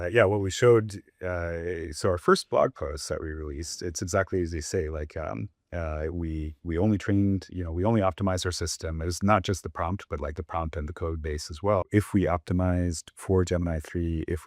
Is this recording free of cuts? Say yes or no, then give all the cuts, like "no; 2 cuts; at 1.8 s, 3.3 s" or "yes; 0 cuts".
no; 1 cut; at 11.9 s